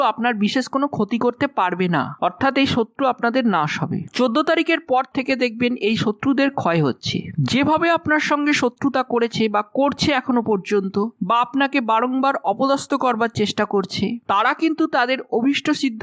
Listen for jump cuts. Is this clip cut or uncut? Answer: uncut